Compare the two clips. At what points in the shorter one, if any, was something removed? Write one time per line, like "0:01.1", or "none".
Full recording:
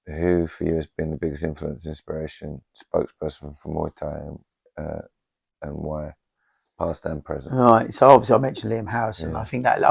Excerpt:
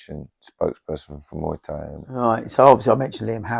0:02.2

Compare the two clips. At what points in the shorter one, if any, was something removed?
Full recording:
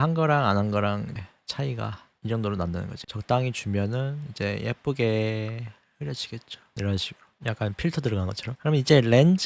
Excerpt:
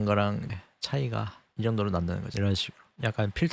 0:02.3

